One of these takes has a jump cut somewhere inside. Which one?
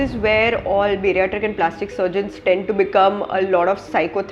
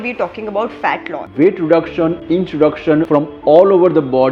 second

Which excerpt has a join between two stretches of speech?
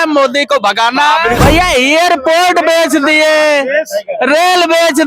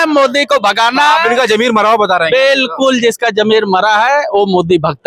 first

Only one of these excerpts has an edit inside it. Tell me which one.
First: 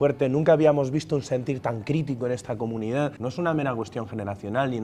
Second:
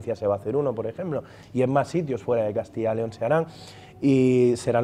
first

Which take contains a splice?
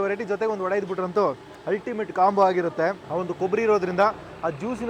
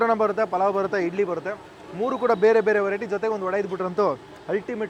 first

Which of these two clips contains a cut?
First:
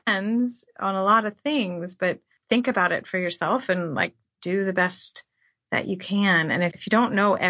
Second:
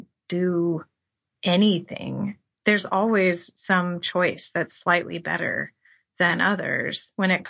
first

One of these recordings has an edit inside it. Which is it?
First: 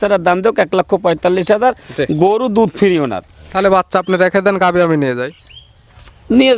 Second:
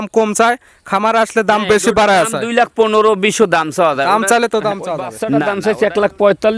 second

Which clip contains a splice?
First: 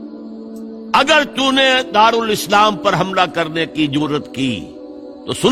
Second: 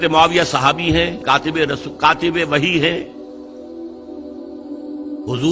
second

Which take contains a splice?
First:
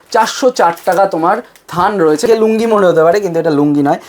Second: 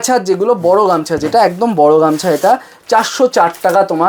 first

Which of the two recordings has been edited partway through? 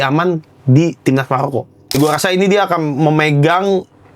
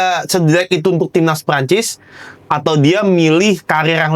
first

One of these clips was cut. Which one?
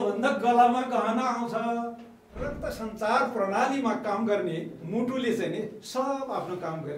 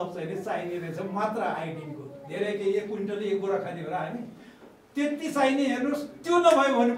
first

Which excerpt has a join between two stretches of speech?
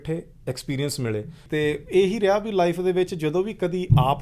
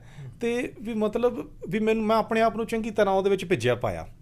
first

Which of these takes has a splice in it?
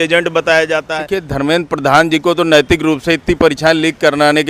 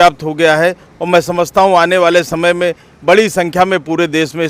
first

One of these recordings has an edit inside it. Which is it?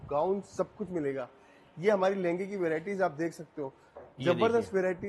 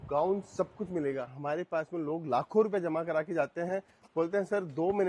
second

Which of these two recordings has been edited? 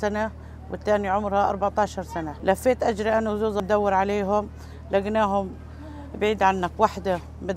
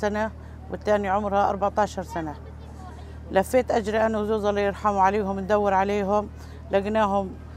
first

